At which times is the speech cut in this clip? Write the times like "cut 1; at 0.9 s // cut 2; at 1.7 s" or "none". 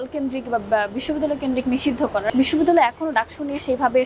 cut 1; at 2.3 s